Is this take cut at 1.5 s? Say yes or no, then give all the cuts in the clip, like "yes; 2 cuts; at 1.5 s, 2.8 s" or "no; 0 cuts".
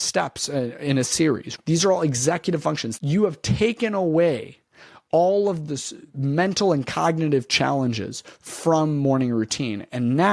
yes; 2 cuts; at 1.5 s, 2.9 s